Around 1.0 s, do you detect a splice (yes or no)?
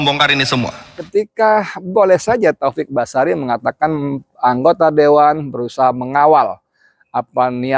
yes